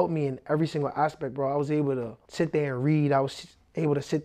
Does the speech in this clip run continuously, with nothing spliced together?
yes; 0 cuts

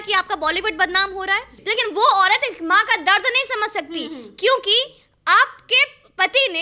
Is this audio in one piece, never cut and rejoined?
no; 1 cut; at 1.5 s

